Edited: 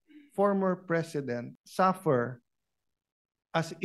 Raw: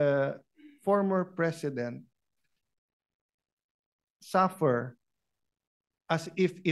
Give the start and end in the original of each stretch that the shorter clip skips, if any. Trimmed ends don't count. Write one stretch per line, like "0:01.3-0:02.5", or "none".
0:02.1-0:04.1